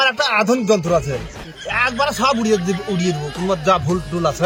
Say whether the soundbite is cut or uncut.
uncut